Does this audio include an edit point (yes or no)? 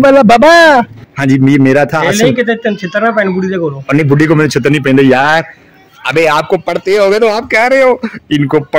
yes